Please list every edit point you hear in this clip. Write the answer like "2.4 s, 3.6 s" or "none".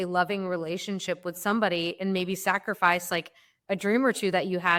none